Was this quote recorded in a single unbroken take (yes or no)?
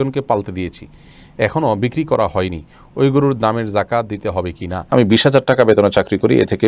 no